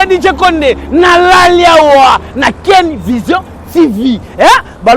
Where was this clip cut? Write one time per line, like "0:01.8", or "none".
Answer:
none

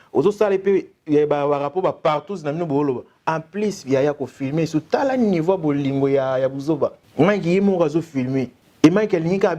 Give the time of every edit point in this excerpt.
0:07.0
0:08.6

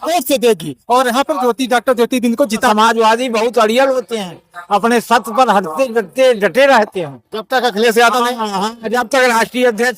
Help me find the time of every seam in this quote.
0:02.7

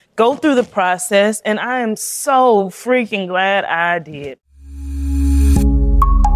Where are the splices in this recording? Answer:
0:04.4

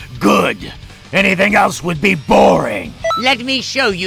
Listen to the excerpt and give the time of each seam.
0:03.2

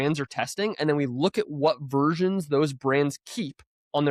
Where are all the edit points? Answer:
none

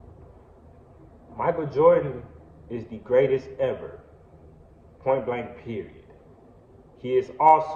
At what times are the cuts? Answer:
none

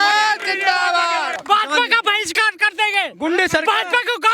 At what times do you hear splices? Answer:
0:01.4

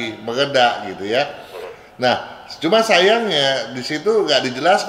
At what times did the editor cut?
none

